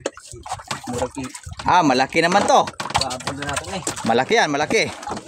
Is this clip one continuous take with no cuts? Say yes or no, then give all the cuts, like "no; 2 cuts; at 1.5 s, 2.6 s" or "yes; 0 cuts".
yes; 0 cuts